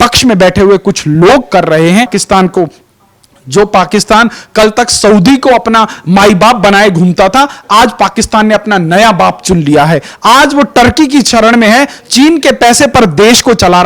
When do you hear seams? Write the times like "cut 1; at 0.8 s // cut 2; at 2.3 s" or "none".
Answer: cut 1; at 2.2 s